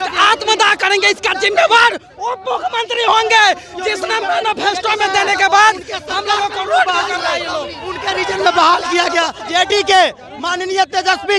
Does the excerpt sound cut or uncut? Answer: cut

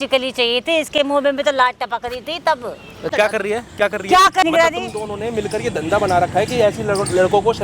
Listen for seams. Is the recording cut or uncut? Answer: cut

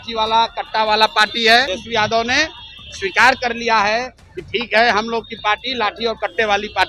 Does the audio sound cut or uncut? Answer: cut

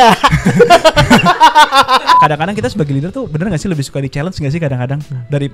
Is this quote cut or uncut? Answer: cut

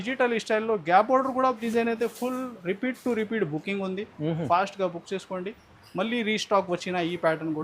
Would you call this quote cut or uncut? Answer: cut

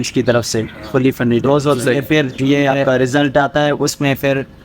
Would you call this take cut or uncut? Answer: cut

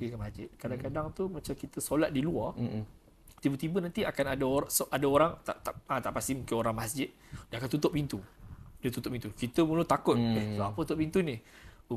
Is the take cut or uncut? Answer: uncut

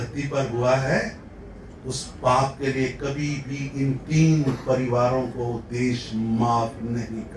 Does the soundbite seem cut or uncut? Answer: uncut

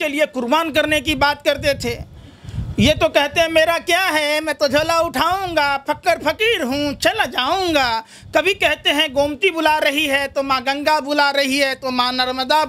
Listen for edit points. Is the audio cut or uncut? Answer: uncut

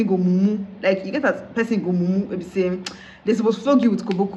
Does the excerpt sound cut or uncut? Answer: uncut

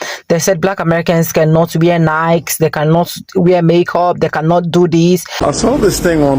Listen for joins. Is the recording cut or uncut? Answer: cut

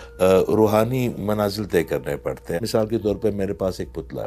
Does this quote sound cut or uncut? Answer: cut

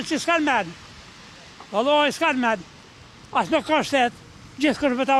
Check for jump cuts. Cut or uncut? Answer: uncut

